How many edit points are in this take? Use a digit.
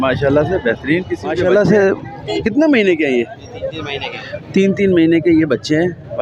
1